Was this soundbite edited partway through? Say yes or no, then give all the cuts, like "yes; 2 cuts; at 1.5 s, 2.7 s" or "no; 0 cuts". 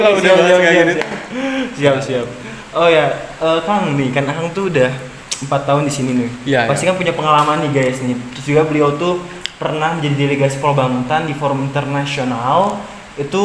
no; 0 cuts